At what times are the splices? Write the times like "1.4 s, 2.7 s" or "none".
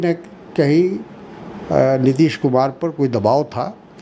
none

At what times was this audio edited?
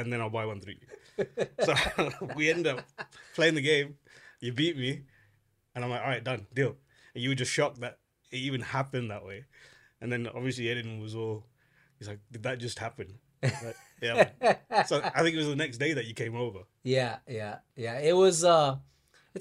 none

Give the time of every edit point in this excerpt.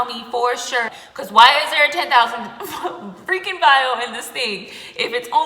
0.9 s

